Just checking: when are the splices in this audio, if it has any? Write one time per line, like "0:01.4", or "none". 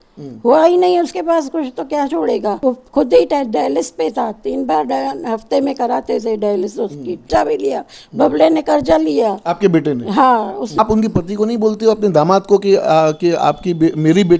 0:02.6
0:07.3
0:10.7